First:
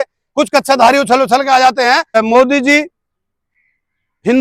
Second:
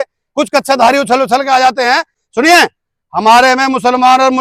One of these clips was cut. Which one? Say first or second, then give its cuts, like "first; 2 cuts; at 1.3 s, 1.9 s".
first; 1 cut; at 2.2 s